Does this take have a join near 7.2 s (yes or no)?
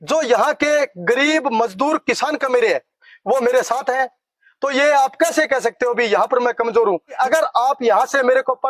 yes